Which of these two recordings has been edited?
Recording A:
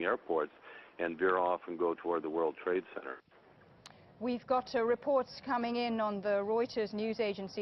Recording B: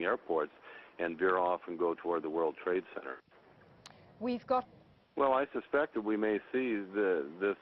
A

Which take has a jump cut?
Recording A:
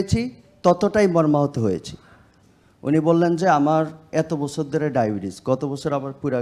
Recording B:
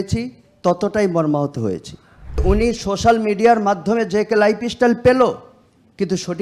B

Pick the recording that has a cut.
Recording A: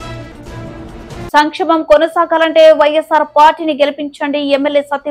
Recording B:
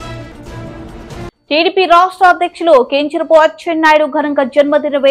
A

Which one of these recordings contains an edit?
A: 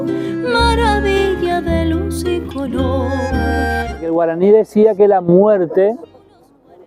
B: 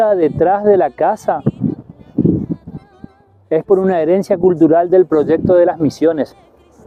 A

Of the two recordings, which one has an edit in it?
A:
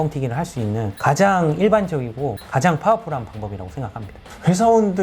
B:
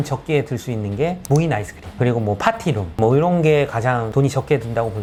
A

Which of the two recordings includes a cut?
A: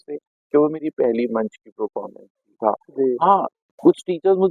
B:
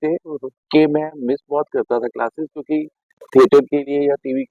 A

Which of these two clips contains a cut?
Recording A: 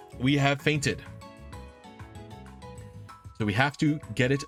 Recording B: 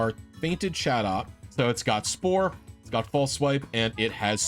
B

